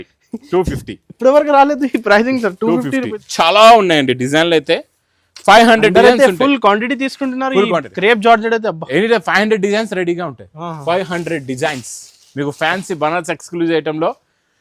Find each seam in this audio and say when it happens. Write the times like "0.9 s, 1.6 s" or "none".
3.2 s